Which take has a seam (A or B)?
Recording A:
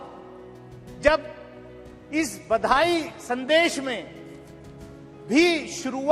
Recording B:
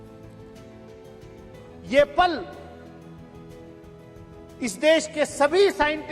B